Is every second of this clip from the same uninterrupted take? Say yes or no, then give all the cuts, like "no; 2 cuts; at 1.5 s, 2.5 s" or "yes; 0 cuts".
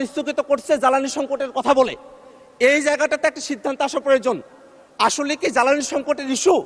yes; 0 cuts